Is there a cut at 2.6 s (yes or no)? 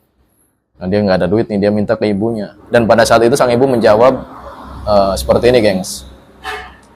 yes